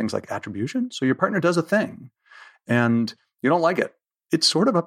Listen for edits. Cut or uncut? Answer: uncut